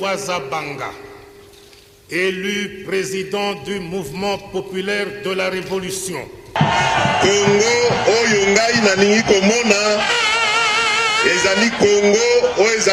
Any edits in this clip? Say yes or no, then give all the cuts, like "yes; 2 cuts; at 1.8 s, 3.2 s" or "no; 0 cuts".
no; 0 cuts